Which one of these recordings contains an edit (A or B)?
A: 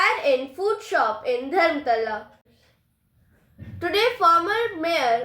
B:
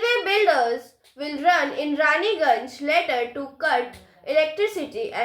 A